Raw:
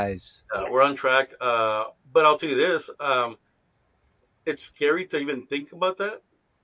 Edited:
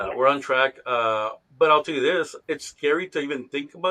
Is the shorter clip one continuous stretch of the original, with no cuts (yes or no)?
no